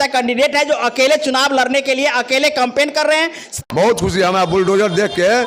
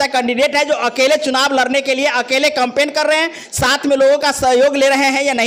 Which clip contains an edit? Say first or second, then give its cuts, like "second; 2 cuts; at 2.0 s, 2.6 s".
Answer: first; 1 cut; at 3.5 s